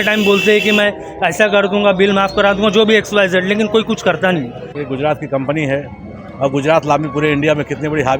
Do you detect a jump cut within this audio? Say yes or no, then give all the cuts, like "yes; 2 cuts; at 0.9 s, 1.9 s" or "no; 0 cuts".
yes; 1 cut; at 4.8 s